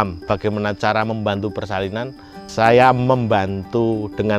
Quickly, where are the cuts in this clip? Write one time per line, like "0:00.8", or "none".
0:02.4